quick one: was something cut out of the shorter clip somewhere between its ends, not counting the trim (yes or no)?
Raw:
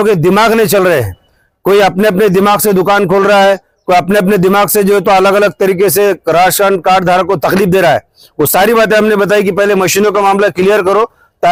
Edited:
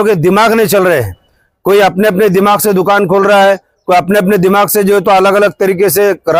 no